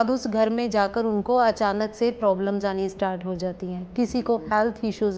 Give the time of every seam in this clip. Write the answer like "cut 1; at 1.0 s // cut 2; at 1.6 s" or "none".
none